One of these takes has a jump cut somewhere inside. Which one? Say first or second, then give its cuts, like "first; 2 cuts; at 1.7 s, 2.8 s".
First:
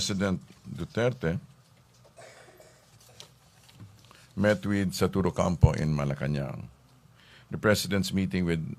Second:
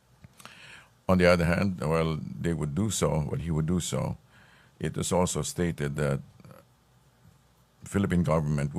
second; 1 cut; at 2.0 s